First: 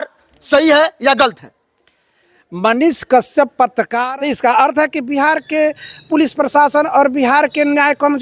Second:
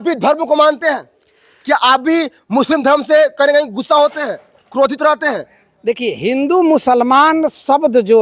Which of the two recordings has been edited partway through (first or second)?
first